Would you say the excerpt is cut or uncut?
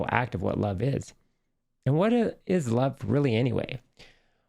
cut